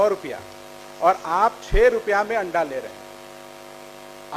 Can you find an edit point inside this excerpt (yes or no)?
no